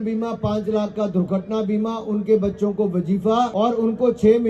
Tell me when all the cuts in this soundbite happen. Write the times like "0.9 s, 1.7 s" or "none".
3.5 s